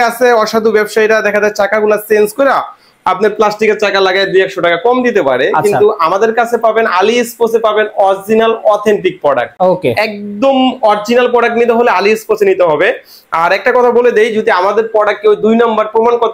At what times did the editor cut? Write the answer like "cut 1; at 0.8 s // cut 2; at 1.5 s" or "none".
none